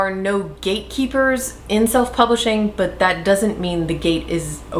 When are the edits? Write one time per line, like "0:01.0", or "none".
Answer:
none